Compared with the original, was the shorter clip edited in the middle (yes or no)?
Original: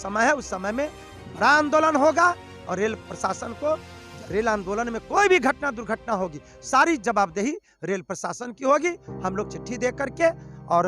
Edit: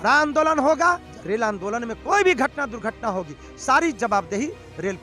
yes